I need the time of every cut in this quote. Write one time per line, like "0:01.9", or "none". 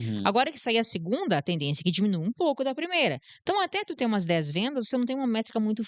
none

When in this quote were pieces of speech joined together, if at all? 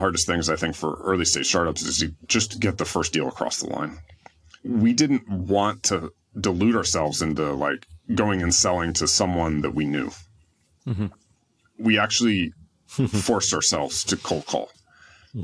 none

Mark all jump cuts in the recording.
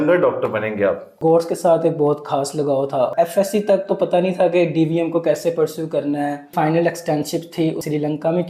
0:01.1
0:03.1
0:06.5

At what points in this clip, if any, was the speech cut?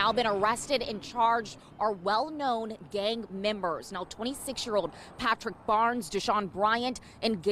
none

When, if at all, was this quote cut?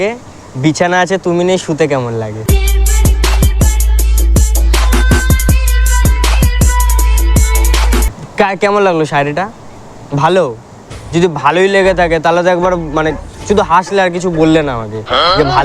none

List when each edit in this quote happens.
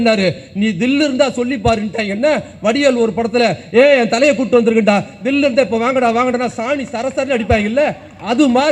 none

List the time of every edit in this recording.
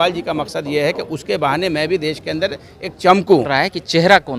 0:03.5

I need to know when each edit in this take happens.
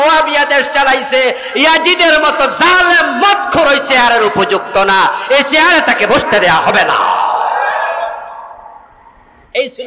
none

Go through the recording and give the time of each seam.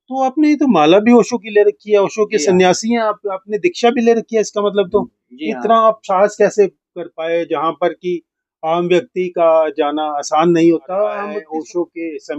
0:11.2

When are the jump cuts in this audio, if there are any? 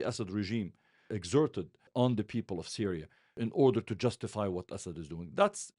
0:01.1
0:01.9
0:03.2

